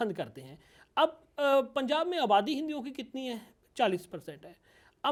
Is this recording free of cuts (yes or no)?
yes